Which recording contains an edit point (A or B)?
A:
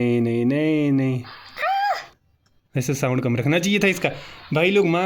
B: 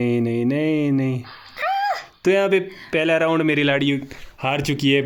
A